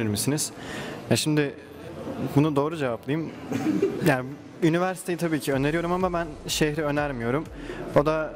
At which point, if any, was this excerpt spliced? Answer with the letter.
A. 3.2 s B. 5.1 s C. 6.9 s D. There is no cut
D